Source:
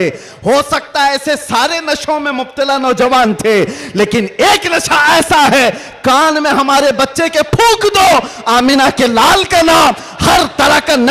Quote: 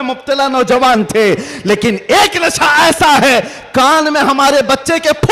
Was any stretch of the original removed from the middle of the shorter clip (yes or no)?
no